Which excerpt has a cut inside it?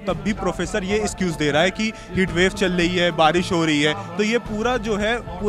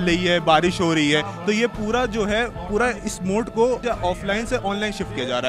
second; 1 cut; at 3.8 s

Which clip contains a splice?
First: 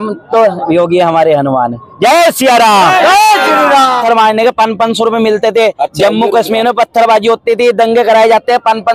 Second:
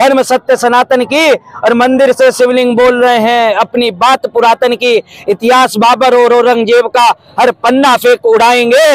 first; 1 cut; at 4.0 s

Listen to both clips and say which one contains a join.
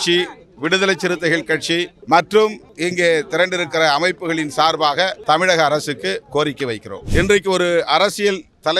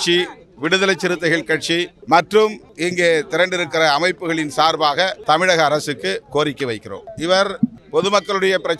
first; 1 cut; at 7.0 s

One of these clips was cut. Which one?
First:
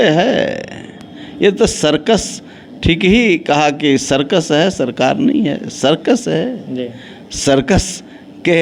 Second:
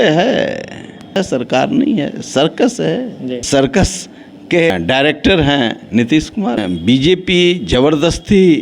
second; 4 cuts; at 1.2 s, 3.4 s, 4.7 s, 6.6 s

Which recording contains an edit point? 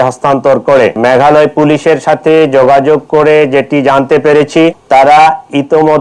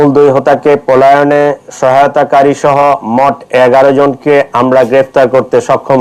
first; 2 cuts; at 1.0 s, 4.8 s

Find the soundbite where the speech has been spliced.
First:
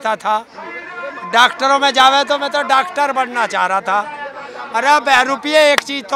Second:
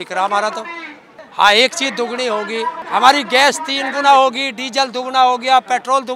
second; 2 cuts; at 1.1 s, 2.8 s

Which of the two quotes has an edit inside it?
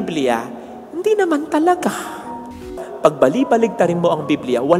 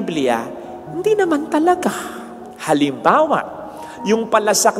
first; 1 cut; at 2.6 s

